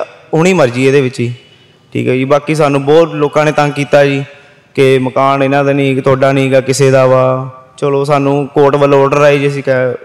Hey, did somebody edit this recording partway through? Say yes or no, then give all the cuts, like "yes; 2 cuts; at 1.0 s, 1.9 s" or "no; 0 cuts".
no; 0 cuts